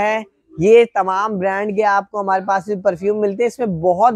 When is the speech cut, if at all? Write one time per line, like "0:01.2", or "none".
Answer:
none